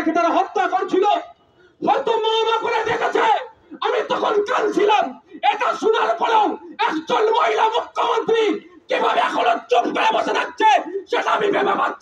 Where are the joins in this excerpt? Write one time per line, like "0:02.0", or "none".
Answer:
none